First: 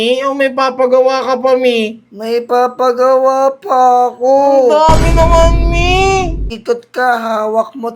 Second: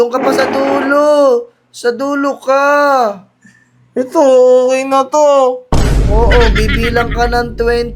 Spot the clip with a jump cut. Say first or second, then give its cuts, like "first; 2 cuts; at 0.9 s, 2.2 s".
first; 1 cut; at 6.5 s